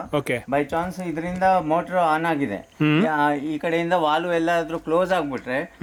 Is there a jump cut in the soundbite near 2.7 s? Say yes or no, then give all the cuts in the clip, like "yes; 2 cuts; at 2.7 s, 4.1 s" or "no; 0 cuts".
no; 0 cuts